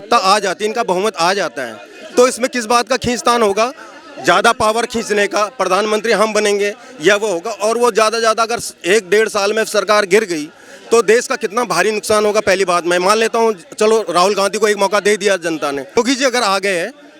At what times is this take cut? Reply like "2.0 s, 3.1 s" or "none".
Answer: 16.0 s